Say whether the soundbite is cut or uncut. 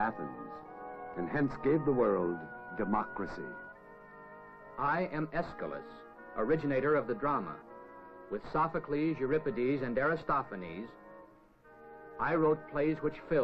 uncut